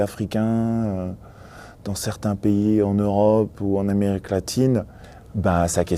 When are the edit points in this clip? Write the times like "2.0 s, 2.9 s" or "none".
5.0 s